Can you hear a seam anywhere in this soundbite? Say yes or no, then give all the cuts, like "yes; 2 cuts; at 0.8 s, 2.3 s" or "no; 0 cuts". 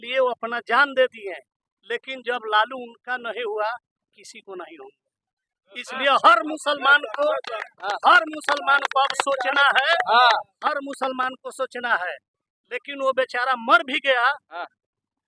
no; 0 cuts